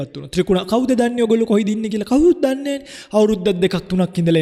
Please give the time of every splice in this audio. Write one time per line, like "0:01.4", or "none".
none